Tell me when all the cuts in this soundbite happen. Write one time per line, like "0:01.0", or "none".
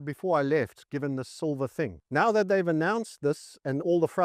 0:02.0

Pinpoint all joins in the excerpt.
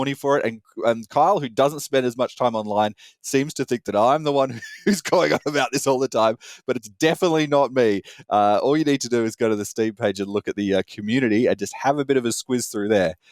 none

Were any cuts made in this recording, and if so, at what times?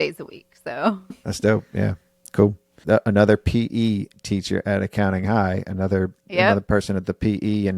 0:01.1
0:02.7

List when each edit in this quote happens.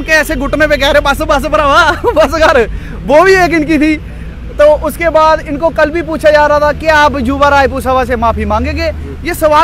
none

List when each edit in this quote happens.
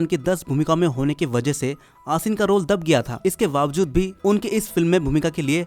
none

